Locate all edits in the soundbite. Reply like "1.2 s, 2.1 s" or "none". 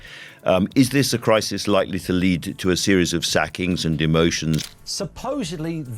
4.8 s